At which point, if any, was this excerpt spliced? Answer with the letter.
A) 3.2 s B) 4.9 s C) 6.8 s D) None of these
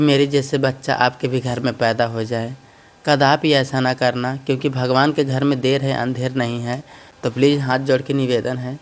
D